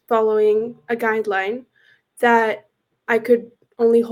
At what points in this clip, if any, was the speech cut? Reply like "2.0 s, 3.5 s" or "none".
3.0 s